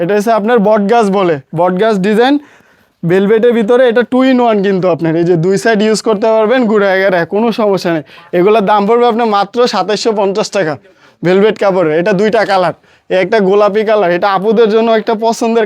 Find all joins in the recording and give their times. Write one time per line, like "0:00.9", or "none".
none